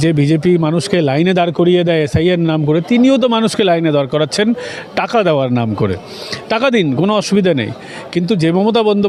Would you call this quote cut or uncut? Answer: uncut